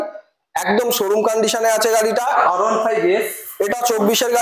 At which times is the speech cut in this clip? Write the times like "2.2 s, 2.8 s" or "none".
2.4 s